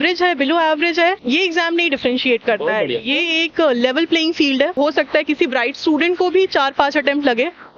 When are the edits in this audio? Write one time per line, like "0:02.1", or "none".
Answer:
0:01.2
0:04.8